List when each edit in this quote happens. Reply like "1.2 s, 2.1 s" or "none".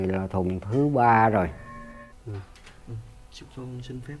2.0 s